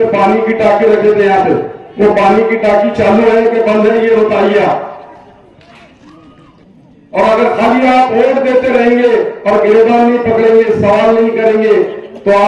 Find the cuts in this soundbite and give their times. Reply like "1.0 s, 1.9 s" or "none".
6.6 s